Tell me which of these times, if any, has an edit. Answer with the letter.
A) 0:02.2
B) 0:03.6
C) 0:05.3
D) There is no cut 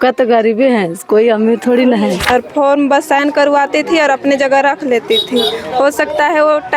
A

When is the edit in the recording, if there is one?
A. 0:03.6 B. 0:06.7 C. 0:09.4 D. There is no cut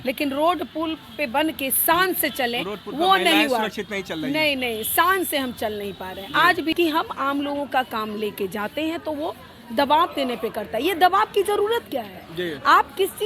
B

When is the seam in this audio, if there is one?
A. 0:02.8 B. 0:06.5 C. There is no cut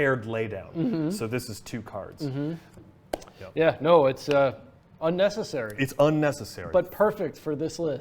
A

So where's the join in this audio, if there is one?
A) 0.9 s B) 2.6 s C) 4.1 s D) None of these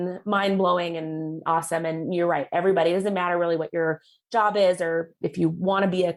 D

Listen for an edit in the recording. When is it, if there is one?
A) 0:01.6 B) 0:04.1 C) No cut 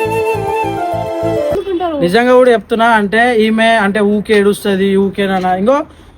A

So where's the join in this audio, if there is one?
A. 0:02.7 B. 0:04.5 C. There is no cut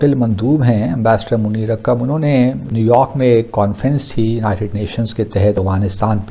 A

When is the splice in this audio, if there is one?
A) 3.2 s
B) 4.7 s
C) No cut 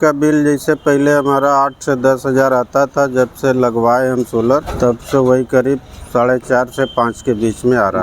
B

